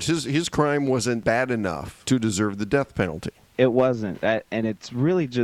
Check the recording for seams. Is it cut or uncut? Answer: cut